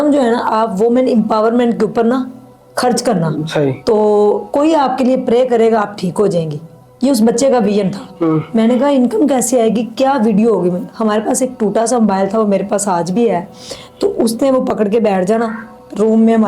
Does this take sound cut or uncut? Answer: uncut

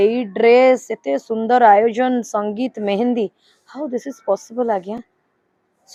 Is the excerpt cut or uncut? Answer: uncut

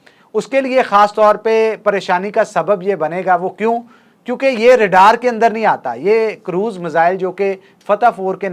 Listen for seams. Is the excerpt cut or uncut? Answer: uncut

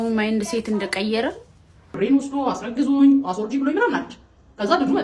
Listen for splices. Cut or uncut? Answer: cut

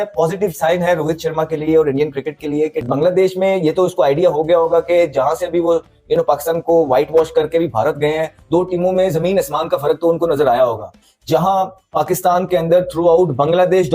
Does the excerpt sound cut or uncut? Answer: uncut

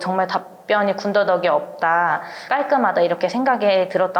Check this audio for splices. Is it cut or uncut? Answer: cut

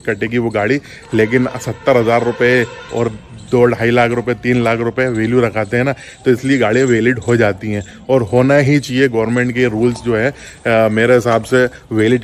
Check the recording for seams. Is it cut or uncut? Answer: uncut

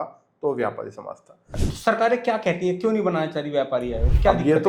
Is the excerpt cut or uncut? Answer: cut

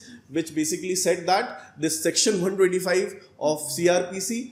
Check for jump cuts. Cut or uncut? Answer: uncut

